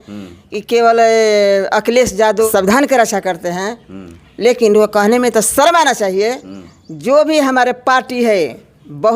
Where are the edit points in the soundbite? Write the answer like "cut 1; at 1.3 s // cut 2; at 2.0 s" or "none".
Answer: cut 1; at 2.5 s

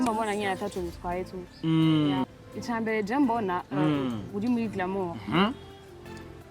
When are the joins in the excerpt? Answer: cut 1; at 2.3 s

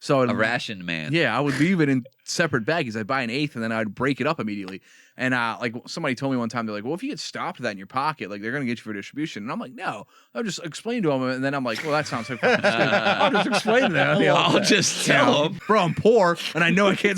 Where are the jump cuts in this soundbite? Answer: cut 1; at 15.6 s

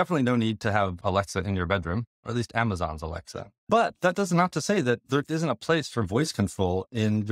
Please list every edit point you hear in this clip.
cut 1; at 0.9 s // cut 2; at 2.2 s // cut 3; at 3.7 s

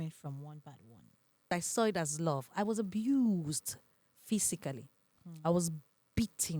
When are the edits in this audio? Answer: cut 1; at 1.6 s

